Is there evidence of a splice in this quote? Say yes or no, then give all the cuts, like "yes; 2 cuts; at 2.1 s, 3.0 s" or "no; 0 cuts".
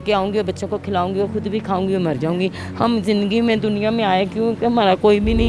no; 0 cuts